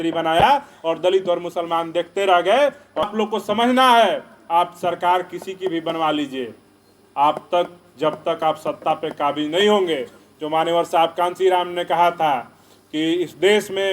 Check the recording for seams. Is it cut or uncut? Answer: cut